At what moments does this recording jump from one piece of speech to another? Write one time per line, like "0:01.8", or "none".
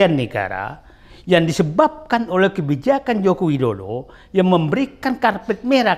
none